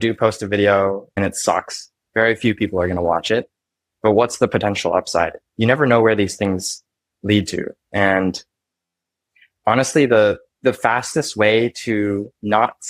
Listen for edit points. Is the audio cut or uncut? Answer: cut